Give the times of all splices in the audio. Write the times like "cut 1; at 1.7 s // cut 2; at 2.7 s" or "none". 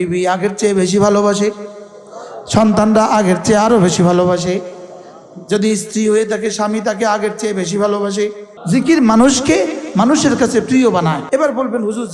cut 1; at 8.5 s // cut 2; at 11.2 s